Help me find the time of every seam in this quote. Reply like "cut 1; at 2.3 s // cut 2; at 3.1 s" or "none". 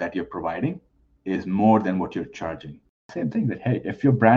cut 1; at 3.0 s

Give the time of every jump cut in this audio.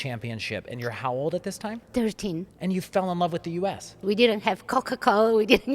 cut 1; at 4.0 s

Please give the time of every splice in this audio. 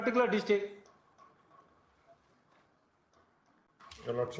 none

